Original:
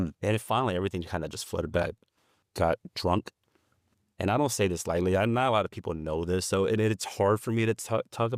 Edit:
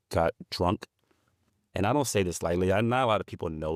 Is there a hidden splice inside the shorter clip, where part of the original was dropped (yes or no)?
no